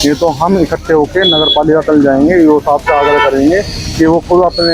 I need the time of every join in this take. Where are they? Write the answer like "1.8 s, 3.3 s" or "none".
none